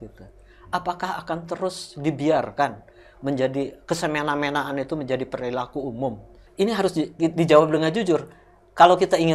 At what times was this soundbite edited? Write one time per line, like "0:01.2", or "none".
0:06.4